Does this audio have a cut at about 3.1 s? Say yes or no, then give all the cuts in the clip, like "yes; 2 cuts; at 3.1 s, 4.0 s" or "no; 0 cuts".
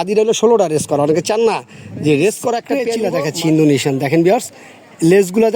yes; 1 cut; at 3.1 s